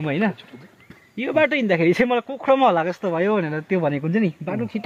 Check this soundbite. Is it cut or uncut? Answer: uncut